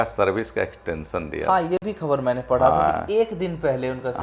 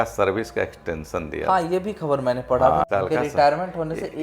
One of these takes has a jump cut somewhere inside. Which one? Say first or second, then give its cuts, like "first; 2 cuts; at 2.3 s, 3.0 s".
second; 1 cut; at 2.8 s